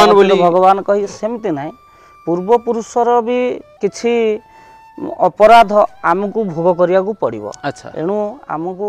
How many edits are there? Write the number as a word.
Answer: zero